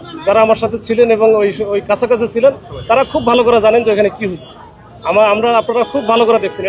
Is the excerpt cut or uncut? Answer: uncut